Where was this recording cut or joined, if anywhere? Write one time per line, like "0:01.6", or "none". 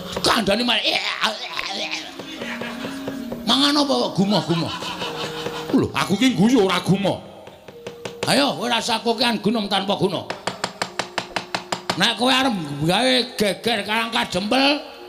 none